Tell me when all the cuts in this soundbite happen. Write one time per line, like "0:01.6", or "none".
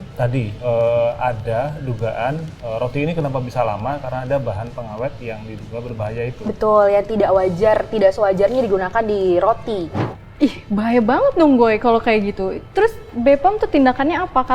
0:10.0